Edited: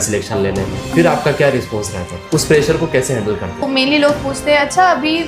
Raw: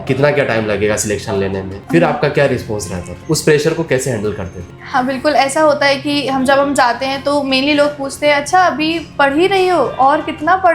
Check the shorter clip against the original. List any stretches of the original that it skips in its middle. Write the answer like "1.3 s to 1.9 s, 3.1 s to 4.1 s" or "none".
4.6 s to 7.4 s